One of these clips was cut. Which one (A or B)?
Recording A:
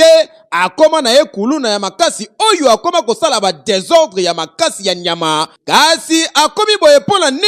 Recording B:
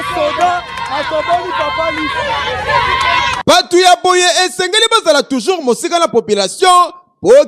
A